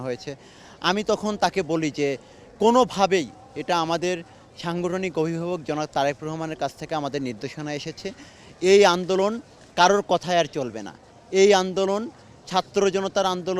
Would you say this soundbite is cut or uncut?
uncut